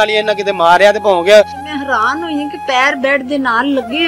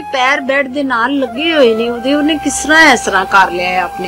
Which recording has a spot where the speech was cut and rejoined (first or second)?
first